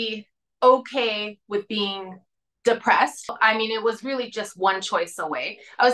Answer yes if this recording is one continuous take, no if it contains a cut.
no